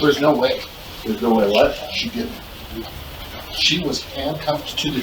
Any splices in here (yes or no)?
no